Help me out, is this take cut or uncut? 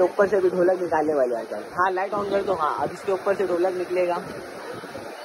uncut